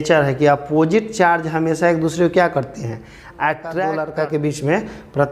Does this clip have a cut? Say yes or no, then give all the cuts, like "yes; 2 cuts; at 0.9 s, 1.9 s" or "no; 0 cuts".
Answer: yes; 1 cut; at 4.0 s